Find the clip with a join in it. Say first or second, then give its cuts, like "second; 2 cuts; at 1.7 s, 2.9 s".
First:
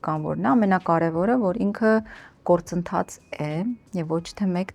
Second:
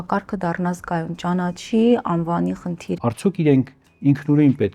second; 1 cut; at 2.9 s